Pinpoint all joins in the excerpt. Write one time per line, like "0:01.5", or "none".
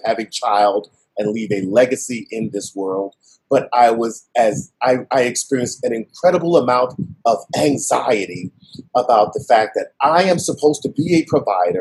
none